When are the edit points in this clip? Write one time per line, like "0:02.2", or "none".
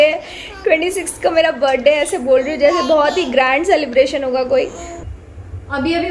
0:04.9